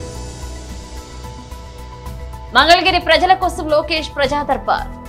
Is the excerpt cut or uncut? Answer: cut